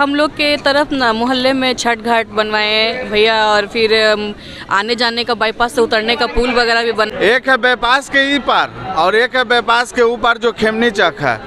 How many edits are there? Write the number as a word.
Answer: one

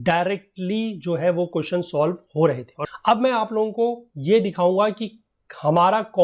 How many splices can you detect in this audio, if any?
one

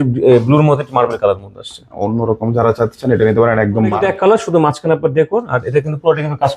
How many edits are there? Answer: one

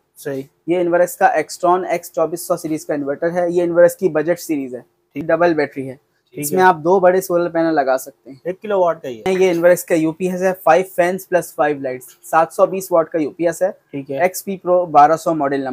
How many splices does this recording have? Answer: two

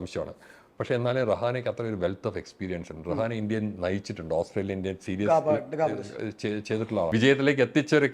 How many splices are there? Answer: one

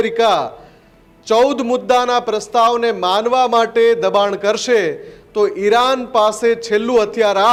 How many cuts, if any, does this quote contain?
zero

